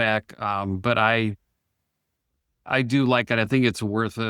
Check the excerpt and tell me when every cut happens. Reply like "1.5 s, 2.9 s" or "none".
2.3 s